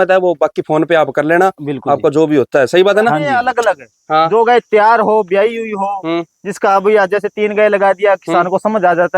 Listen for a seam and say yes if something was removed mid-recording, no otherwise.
yes